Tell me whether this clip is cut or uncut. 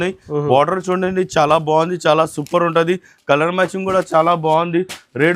uncut